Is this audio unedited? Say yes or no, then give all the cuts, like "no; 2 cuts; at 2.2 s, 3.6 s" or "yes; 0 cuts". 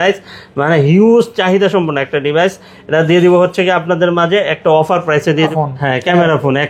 no; 1 cut; at 5.5 s